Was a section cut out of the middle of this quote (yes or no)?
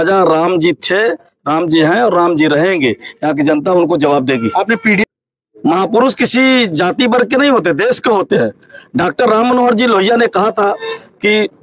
yes